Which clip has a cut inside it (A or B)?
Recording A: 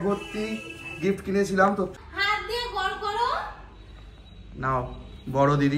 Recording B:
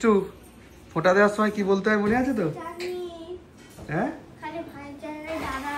A